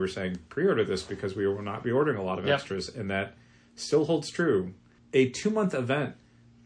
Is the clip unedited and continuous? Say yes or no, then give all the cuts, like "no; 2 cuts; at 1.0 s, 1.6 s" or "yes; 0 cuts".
no; 1 cut; at 4.9 s